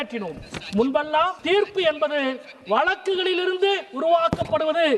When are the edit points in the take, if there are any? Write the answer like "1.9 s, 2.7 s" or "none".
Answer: 1.4 s